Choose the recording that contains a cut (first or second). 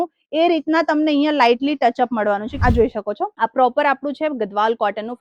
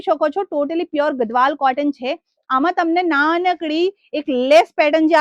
first